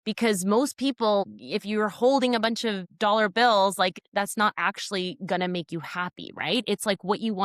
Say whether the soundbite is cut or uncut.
cut